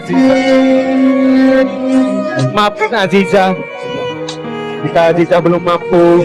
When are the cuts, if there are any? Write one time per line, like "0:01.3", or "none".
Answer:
0:03.6
0:04.8